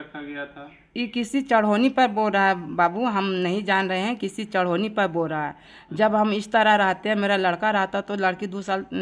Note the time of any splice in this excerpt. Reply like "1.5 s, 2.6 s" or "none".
none